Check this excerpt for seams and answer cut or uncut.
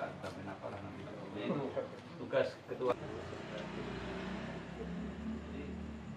cut